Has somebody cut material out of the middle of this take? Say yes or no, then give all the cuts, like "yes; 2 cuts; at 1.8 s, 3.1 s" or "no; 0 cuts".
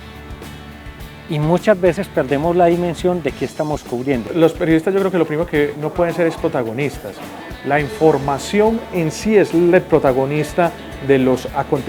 yes; 1 cut; at 4.3 s